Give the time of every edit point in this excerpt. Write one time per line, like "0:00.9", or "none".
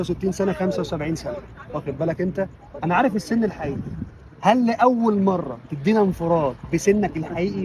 none